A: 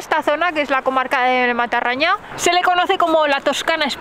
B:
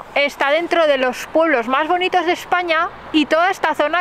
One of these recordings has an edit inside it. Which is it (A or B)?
A